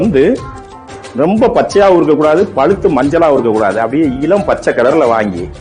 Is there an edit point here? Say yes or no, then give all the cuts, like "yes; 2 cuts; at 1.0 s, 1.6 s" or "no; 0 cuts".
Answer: no; 0 cuts